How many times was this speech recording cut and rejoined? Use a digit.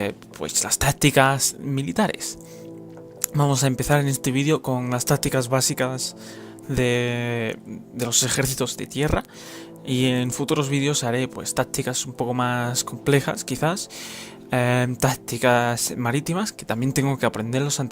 1